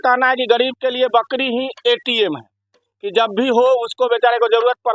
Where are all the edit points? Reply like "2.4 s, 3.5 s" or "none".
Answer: none